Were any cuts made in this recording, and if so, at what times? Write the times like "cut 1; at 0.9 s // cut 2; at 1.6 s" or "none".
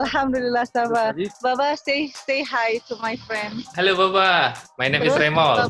cut 1; at 3.6 s // cut 2; at 4.7 s